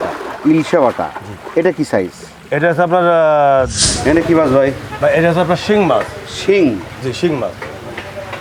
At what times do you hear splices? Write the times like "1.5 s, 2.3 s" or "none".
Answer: 3.8 s